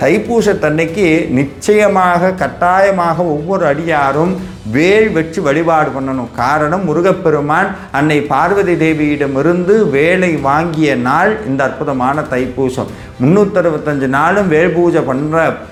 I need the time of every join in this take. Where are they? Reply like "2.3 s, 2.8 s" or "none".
none